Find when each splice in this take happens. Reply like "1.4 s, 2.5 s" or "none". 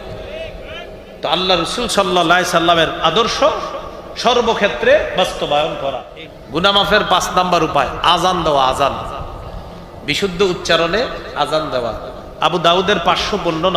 6.1 s